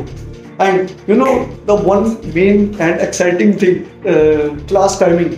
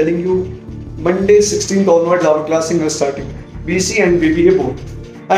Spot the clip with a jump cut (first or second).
first